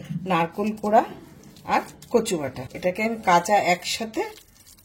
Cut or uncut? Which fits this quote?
cut